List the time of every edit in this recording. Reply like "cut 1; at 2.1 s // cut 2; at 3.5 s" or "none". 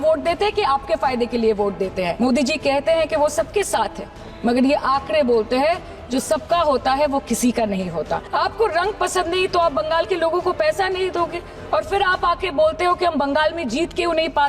cut 1; at 2.1 s // cut 2; at 8.2 s